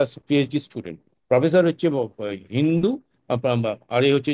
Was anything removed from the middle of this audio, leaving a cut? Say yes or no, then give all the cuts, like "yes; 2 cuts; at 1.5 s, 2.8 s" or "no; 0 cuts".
no; 0 cuts